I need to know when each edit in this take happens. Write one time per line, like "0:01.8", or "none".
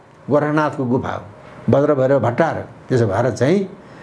none